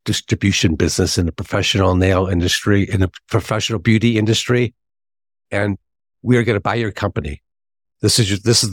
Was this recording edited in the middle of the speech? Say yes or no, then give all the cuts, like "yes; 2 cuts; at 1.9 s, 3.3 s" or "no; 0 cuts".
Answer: no; 0 cuts